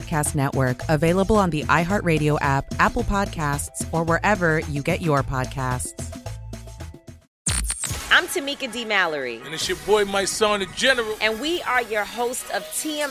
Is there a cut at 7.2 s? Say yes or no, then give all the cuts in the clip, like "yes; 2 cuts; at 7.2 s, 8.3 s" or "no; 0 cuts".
yes; 1 cut; at 7.2 s